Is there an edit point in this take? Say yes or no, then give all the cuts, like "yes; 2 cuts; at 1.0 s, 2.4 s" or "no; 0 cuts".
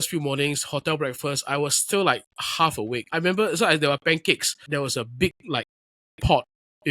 yes; 2 cuts; at 2.9 s, 4.7 s